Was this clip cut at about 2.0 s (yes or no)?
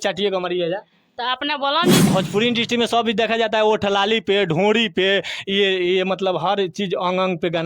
yes